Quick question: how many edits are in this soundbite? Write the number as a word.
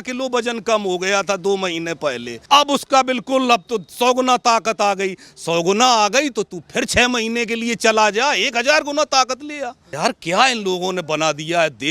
two